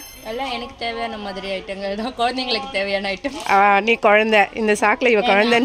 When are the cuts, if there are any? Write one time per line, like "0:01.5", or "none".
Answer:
none